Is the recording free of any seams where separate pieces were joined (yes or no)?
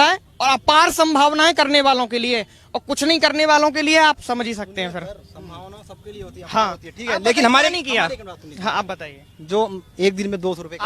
yes